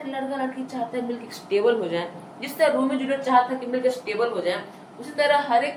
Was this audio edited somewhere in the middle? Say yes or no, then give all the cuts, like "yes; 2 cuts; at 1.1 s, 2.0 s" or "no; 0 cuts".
no; 0 cuts